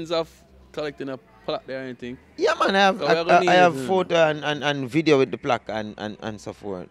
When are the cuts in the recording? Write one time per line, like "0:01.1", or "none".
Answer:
none